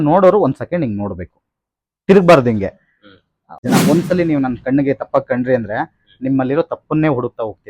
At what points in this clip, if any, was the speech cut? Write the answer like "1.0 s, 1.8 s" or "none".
3.6 s